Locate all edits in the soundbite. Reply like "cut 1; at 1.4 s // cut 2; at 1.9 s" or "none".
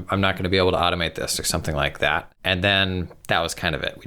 cut 1; at 2.3 s